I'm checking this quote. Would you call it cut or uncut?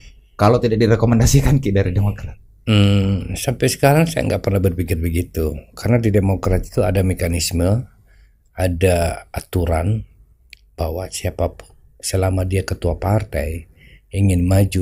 uncut